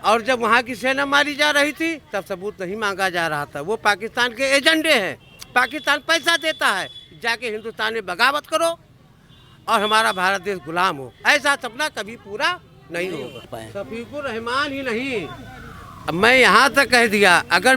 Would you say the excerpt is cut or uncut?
cut